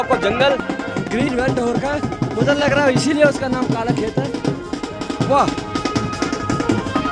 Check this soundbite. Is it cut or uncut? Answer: cut